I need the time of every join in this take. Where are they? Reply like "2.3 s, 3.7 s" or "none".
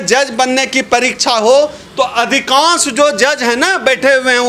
none